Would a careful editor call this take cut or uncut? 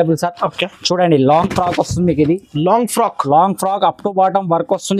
uncut